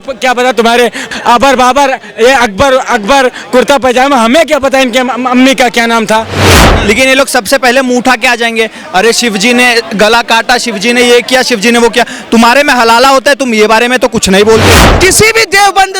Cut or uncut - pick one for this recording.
cut